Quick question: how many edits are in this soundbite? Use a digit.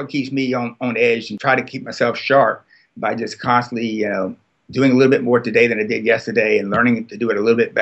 1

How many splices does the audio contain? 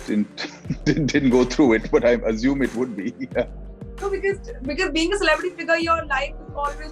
0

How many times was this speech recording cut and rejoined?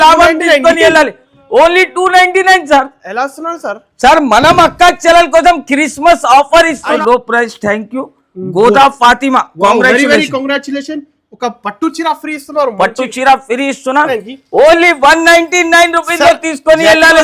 2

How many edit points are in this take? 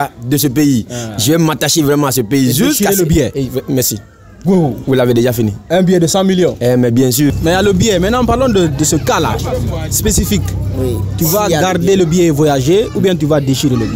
1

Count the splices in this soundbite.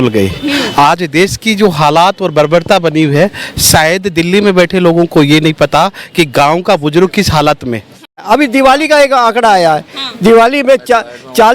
1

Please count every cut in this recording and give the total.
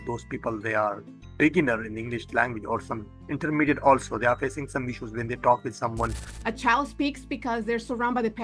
1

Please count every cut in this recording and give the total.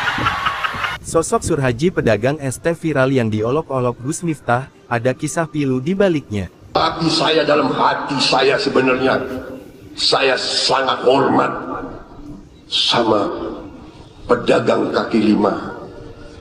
2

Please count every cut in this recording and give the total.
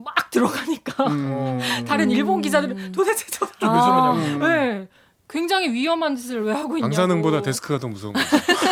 0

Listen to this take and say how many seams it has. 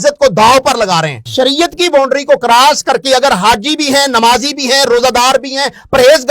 1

